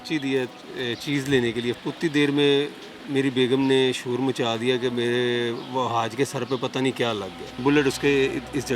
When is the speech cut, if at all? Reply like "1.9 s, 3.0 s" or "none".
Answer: 1.8 s, 7.6 s

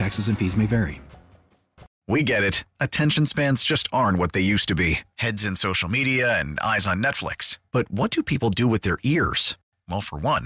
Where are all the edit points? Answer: 1.9 s

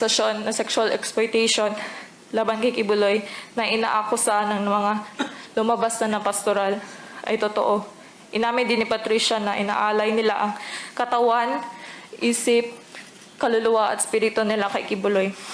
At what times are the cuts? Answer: none

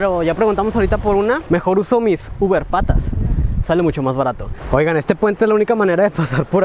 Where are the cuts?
1.4 s, 4.5 s

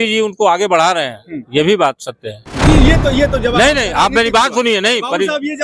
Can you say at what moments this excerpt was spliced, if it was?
2.5 s

